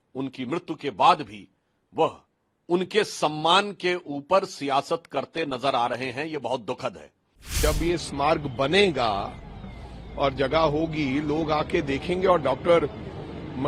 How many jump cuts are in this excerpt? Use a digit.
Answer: 1